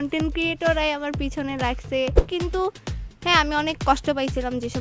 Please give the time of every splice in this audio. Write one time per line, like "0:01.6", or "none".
0:02.3